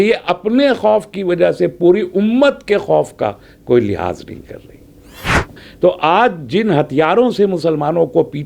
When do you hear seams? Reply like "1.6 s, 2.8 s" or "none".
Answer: 5.5 s